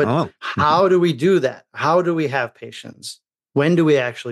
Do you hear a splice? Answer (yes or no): no